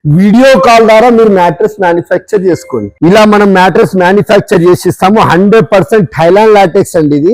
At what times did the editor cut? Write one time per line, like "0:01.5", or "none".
0:02.8